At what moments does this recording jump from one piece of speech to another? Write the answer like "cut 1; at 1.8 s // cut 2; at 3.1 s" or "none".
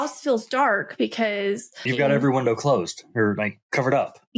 cut 1; at 1.9 s